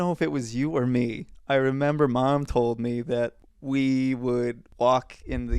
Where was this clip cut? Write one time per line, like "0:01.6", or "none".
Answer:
0:01.3
0:03.5
0:04.6